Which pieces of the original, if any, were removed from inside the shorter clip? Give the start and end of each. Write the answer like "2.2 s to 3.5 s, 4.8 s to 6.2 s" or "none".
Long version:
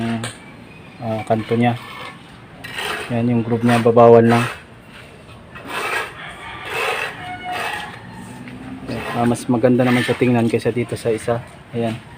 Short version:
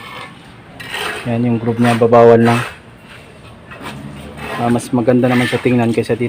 5.7 s to 8.5 s